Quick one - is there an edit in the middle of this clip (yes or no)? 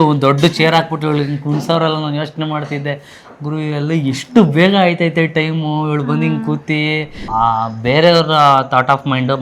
yes